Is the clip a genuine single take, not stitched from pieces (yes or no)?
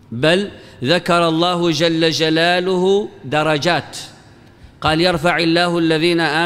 yes